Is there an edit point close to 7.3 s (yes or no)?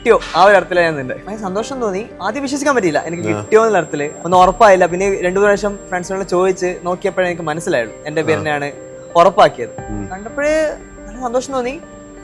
no